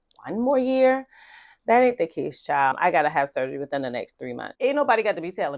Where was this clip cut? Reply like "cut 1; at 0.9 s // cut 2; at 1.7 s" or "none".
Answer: cut 1; at 4.5 s